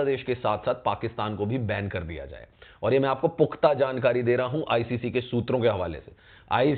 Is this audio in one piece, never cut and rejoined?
yes; 0 cuts

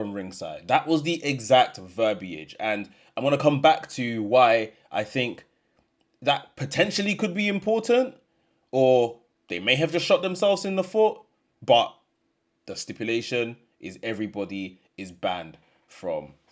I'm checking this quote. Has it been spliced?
no; 0 cuts

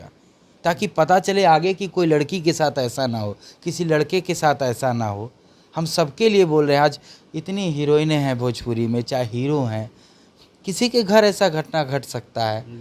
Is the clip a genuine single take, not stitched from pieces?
yes; 0 cuts

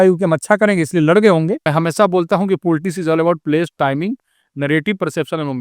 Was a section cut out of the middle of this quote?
yes; 1 cut; at 1.6 s

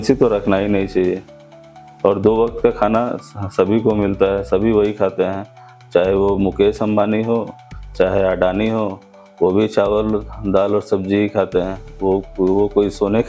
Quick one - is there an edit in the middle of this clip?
no; 0 cuts

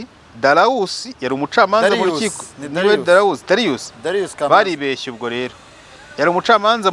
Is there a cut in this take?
no; 0 cuts

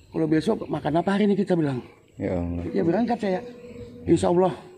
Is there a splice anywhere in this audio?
yes; 2 cuts; at 2.5 s, 4.0 s

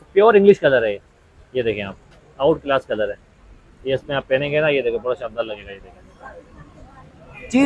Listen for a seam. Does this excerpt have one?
no; 0 cuts

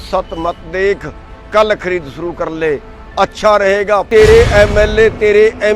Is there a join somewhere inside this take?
yes; 1 cut; at 4.1 s

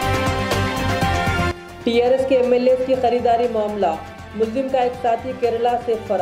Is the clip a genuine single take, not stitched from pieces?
no; 1 cut; at 1.5 s

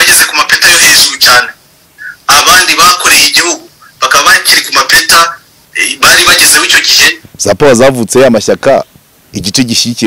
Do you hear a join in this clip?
yes; 1 cut; at 7.3 s

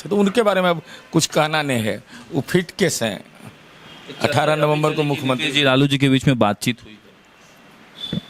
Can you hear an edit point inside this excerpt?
no; 0 cuts

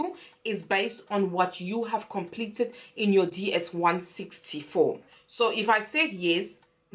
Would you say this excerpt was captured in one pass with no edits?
no; 1 cut; at 5.1 s

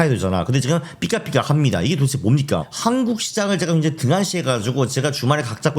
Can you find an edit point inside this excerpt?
yes; 1 cut; at 2.6 s

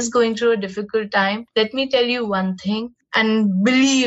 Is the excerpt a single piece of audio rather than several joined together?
no; 1 cut; at 1.4 s

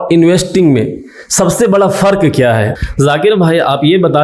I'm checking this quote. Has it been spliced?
yes; 1 cut; at 2.8 s

